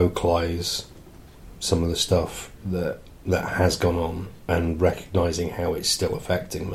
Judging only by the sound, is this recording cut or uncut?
uncut